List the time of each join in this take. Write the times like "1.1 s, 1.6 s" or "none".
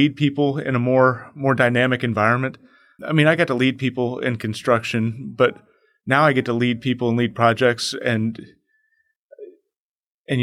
3.0 s